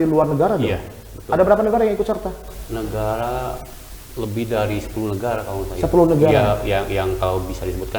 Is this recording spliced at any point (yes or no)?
no